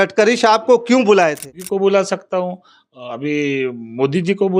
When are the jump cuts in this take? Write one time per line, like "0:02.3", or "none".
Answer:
0:01.5